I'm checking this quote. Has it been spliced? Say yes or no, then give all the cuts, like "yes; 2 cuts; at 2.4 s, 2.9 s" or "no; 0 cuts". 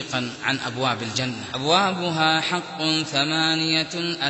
yes; 1 cut; at 1.5 s